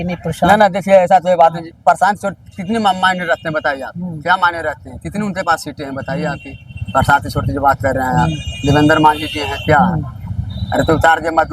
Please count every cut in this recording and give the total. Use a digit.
0